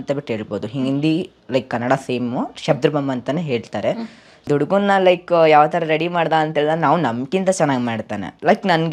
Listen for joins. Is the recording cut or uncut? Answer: cut